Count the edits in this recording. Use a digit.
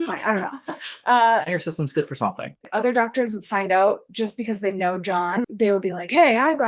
2